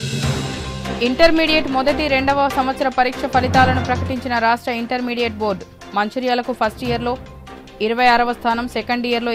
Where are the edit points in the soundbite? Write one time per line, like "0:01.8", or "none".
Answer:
0:01.0